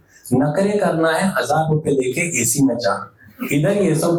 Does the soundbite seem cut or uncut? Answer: uncut